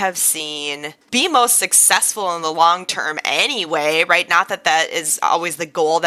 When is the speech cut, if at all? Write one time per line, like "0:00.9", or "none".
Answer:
0:01.0